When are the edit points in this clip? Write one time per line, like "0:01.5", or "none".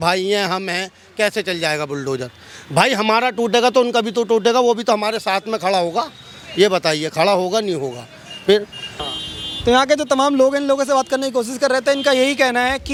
none